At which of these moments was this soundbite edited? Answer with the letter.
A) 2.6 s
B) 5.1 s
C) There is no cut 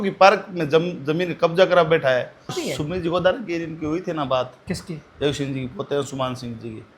A